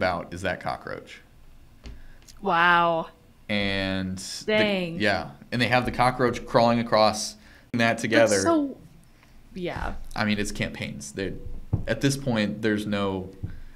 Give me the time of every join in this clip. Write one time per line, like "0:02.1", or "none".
0:07.7